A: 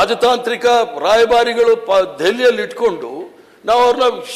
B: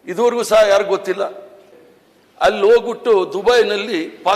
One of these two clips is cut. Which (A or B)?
B